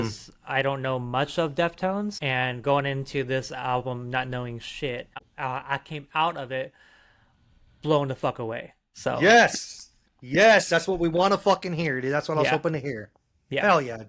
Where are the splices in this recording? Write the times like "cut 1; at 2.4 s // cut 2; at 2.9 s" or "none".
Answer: cut 1; at 2.2 s // cut 2; at 5.2 s